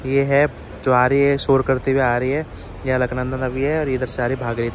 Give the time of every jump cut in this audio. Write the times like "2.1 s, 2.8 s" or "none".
none